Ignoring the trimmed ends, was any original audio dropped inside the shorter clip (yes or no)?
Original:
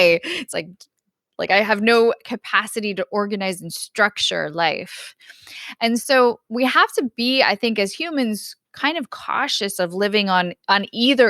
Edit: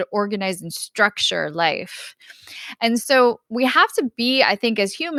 no